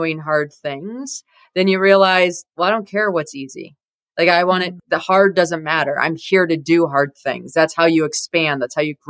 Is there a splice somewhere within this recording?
no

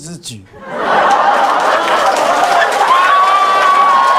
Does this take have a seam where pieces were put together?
no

